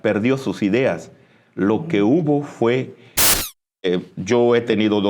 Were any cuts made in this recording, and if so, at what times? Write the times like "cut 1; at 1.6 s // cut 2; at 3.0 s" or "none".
cut 1; at 3.4 s

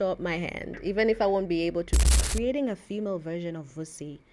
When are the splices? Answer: cut 1; at 2.1 s

